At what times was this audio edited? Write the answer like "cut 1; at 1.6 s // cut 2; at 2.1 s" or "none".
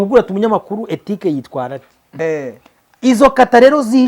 cut 1; at 2.1 s